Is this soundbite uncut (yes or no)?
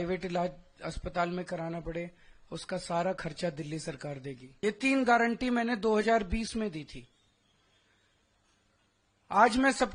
no